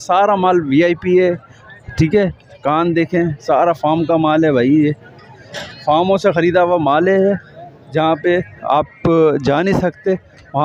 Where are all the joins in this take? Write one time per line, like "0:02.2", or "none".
none